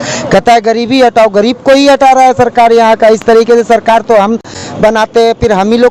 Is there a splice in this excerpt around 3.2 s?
no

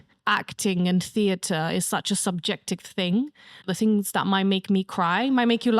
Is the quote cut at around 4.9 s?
no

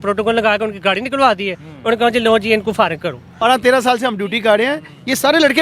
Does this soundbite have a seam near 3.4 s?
yes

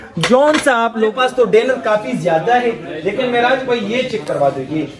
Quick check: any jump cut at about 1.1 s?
yes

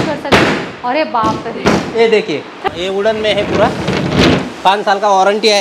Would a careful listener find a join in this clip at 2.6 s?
yes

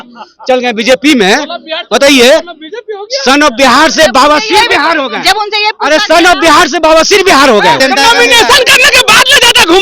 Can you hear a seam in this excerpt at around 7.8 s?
yes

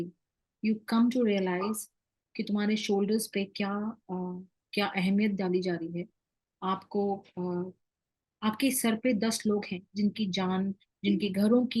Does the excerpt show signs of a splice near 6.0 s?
no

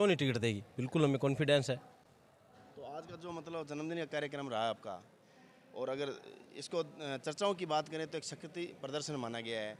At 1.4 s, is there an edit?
no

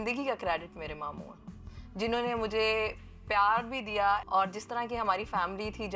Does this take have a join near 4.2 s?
yes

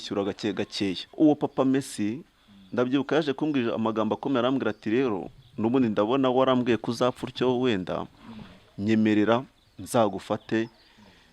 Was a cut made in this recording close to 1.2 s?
yes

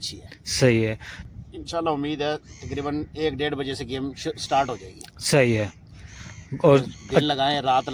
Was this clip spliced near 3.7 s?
no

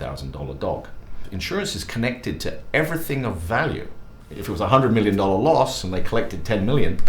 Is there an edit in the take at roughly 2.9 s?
no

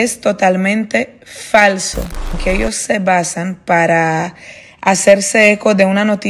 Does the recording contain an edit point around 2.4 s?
yes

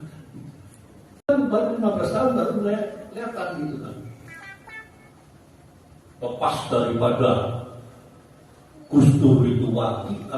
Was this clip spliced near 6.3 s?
no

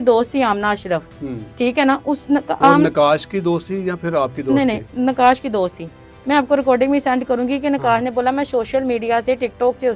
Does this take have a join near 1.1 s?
no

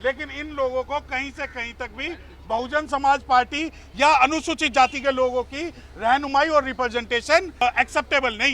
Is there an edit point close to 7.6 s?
yes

